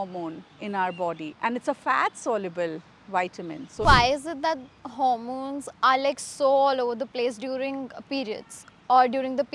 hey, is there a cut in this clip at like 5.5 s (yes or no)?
no